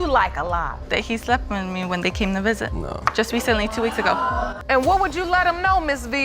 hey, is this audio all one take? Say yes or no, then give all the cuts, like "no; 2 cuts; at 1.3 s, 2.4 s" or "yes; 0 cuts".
no; 1 cut; at 4.6 s